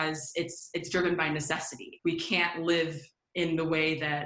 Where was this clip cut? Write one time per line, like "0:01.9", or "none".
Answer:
0:01.9